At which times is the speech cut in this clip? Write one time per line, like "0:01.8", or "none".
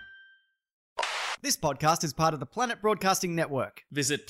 0:01.1

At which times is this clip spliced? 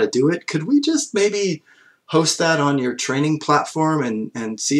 none

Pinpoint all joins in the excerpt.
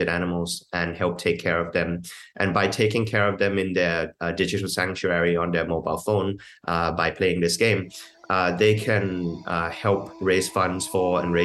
0:10.2

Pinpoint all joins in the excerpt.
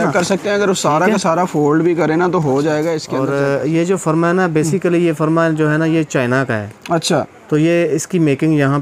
0:03.1

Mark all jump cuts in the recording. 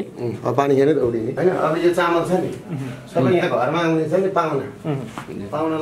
0:01.3

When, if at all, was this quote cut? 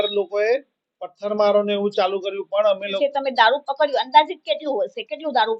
0:03.0

